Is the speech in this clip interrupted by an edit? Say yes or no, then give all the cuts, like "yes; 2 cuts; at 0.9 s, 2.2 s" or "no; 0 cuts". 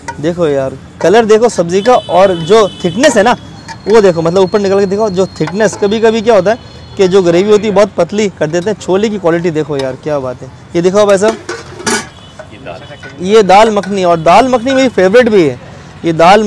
no; 0 cuts